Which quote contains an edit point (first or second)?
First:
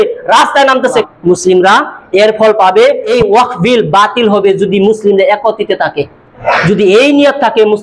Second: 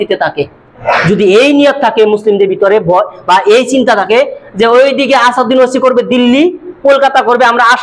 first